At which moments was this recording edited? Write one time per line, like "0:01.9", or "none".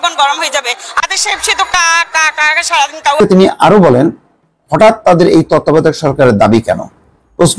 0:03.2